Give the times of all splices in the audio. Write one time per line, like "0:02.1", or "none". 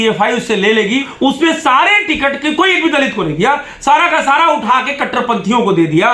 0:01.1